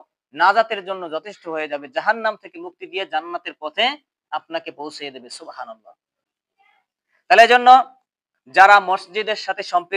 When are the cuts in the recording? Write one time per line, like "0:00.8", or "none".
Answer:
none